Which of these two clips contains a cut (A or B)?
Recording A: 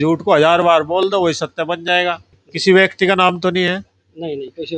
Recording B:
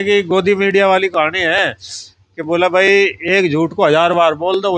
A